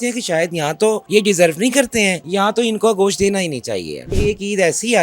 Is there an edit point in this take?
yes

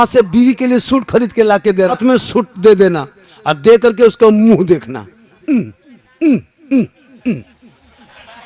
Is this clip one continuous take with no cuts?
no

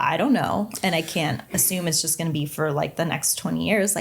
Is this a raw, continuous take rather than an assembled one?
no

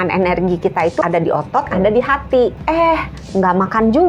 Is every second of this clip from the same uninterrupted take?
no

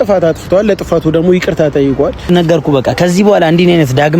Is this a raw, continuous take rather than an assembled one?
no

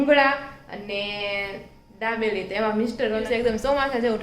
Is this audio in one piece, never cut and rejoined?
no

